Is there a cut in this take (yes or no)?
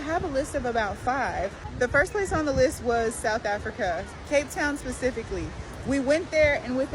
yes